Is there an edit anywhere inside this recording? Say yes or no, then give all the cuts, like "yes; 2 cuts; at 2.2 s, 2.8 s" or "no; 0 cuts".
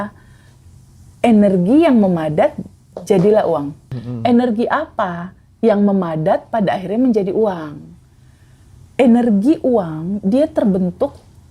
yes; 1 cut; at 3.8 s